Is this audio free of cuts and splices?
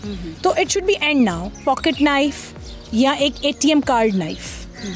no; 1 cut; at 1.5 s

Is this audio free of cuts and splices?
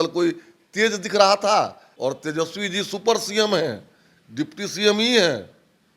no; 1 cut; at 1.8 s

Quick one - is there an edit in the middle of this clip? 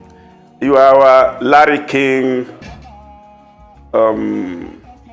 yes; 2 cuts; at 2.7 s, 3.9 s

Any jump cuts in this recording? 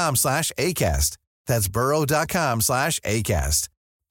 no; 0 cuts

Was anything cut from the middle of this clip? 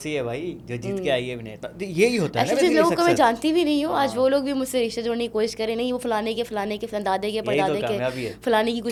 no; 0 cuts

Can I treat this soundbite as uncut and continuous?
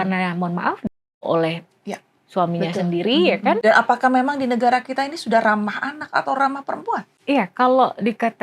no; 2 cuts; at 3.6 s, 7.1 s

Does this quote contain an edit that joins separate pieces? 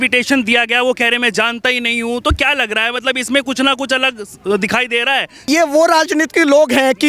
yes; 1 cut; at 5.5 s

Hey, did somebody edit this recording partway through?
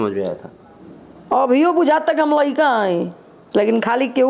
no; 0 cuts

